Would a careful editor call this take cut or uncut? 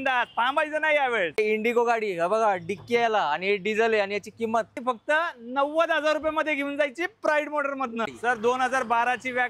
cut